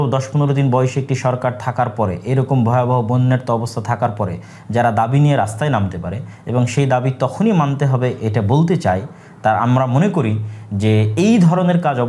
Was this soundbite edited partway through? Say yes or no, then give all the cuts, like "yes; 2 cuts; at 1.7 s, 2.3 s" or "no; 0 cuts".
no; 0 cuts